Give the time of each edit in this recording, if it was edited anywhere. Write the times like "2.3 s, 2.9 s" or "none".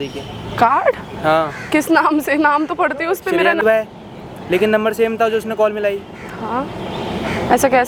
none